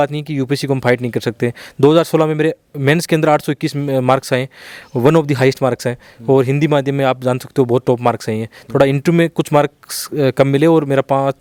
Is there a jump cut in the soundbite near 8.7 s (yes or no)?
no